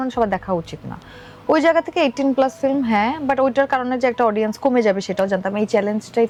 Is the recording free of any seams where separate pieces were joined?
yes; 0 cuts

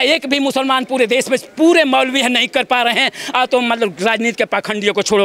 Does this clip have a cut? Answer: no; 0 cuts

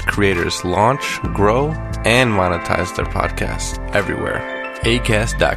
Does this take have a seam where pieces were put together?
no; 0 cuts

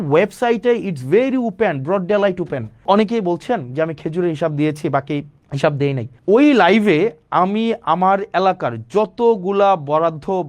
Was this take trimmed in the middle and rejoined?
yes; 3 cuts; at 2.8 s, 5.4 s, 6.1 s

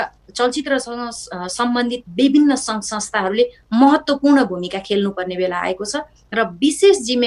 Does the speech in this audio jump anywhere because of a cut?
no; 0 cuts

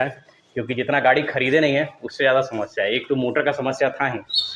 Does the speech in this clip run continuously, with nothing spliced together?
yes; 0 cuts

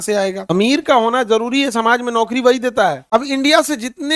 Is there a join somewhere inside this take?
yes; 1 cut; at 3.0 s

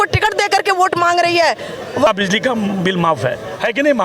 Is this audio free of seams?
no; 1 cut; at 2.1 s

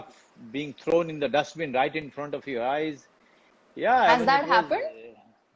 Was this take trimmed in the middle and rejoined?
no; 0 cuts

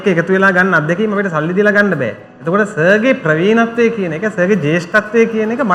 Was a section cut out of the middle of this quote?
no; 0 cuts

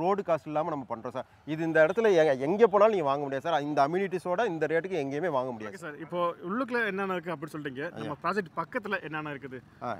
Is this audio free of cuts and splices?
no; 1 cut; at 5.9 s

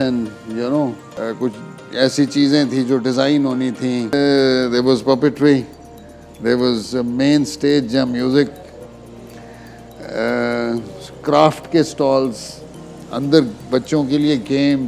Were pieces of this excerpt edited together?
yes; 2 cuts; at 1.1 s, 4.1 s

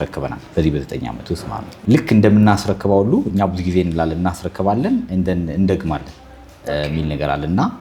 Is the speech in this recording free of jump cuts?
no; 1 cut; at 1.8 s

